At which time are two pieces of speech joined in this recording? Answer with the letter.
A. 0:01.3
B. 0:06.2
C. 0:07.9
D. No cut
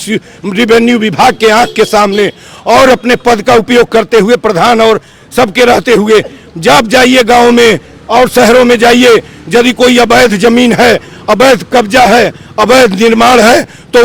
D